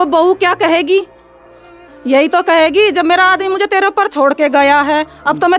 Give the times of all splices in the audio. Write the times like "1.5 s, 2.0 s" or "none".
none